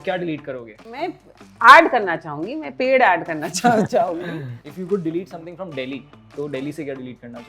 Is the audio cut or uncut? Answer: cut